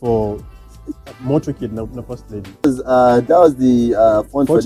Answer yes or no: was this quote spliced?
yes